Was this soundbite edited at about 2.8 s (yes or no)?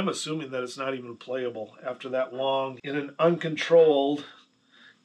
yes